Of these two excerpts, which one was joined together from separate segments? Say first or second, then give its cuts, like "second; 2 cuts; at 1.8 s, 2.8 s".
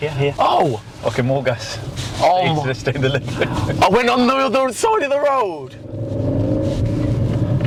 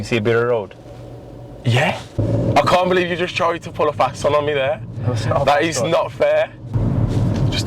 second; 2 cuts; at 2.2 s, 6.7 s